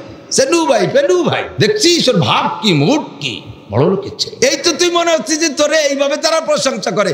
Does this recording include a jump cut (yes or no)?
yes